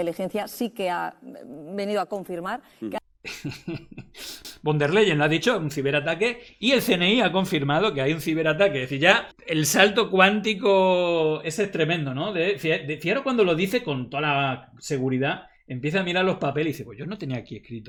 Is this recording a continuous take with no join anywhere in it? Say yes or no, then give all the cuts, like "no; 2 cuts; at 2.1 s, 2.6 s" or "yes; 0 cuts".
yes; 0 cuts